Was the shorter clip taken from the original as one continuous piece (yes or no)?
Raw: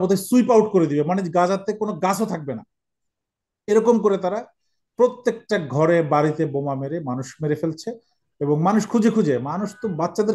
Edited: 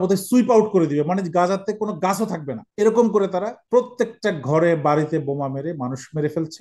no